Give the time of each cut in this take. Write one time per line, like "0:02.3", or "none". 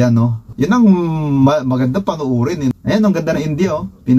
0:02.8

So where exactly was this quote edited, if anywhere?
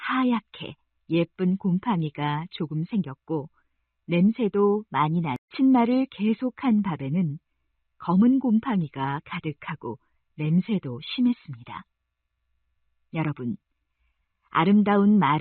0:05.5

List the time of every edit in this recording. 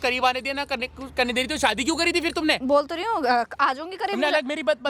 none

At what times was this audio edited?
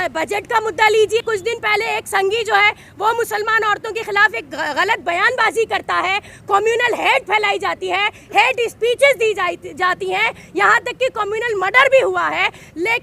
0:01.2

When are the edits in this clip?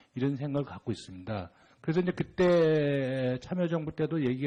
none

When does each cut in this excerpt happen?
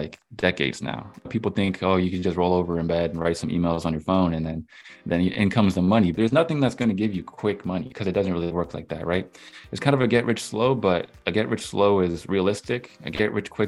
0:01.3
0:06.1
0:07.9

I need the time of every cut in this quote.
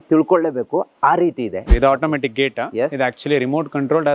0:01.7

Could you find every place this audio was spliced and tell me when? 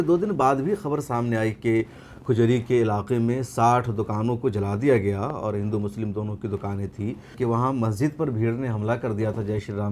0:07.3

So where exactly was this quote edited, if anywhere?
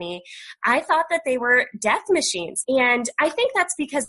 0:02.4

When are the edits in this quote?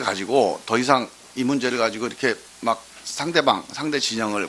0:02.1

